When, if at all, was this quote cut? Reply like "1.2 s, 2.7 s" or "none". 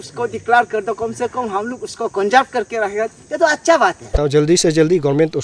4.1 s